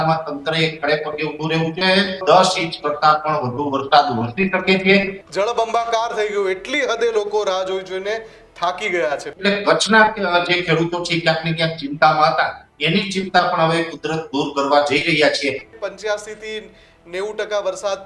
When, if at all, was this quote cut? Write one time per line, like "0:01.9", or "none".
0:02.2
0:05.2
0:09.3
0:15.7